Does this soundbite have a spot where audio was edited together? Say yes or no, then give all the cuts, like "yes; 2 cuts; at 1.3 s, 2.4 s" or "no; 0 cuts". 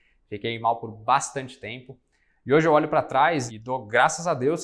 yes; 1 cut; at 3.5 s